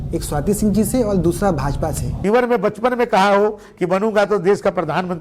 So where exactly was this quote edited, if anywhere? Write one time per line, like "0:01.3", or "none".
0:02.2